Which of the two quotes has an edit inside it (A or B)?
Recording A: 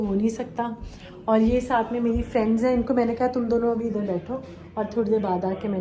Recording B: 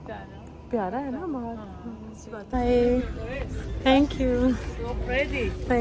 B